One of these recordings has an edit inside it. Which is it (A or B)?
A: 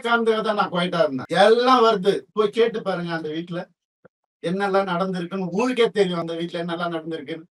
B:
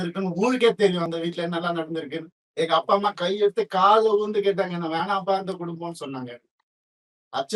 A